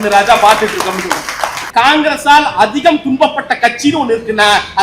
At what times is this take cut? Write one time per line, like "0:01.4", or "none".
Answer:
0:01.6